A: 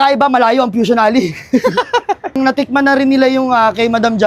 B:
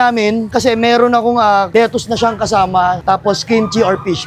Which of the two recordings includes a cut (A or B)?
A